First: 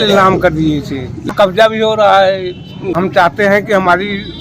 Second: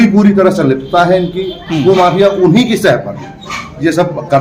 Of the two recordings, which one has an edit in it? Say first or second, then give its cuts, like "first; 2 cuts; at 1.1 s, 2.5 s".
first; 2 cuts; at 1.3 s, 2.9 s